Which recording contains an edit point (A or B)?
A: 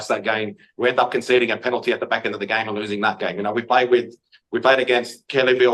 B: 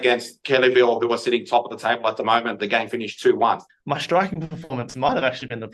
B